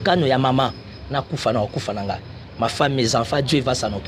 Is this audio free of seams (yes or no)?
yes